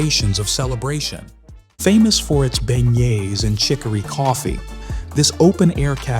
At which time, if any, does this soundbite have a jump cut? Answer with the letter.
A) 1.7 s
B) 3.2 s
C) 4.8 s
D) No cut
A